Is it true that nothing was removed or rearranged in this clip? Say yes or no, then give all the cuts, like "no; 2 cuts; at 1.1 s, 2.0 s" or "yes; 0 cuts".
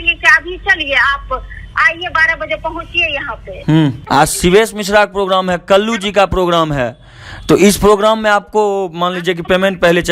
no; 1 cut; at 4.0 s